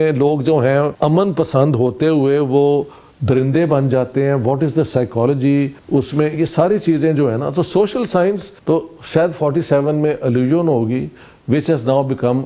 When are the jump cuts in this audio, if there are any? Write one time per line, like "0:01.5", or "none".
0:00.9
0:05.8
0:08.5